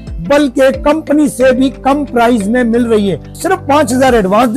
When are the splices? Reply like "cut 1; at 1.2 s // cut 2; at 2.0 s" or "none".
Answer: cut 1; at 3.3 s